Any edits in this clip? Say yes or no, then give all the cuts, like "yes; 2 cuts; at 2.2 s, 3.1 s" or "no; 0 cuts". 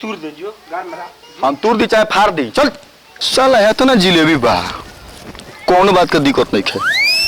yes; 1 cut; at 2.8 s